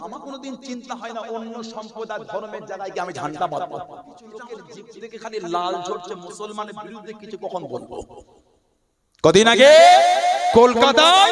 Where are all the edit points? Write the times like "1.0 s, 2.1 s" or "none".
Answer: 4.5 s